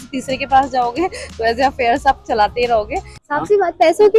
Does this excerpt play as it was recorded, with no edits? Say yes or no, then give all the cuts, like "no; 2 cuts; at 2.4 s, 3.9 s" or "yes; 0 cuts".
no; 1 cut; at 3.2 s